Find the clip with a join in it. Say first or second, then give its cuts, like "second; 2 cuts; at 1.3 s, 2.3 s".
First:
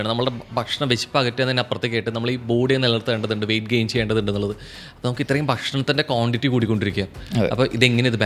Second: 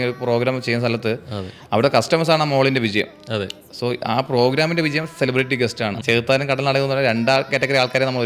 second; 1 cut; at 6.0 s